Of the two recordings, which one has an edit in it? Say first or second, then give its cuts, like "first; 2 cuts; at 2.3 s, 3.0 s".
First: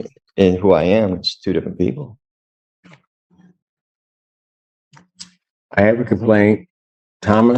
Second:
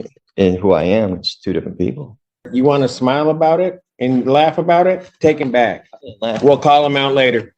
second; 1 cut; at 2.5 s